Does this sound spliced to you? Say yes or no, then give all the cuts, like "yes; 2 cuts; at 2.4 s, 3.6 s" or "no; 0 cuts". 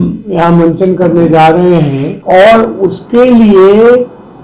yes; 1 cut; at 2.1 s